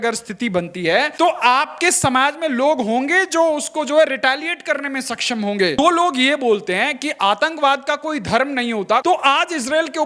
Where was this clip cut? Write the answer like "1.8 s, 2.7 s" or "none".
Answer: 1.1 s, 5.8 s, 9.0 s